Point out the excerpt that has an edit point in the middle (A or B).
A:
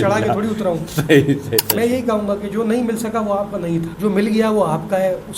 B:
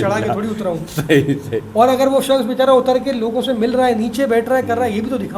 A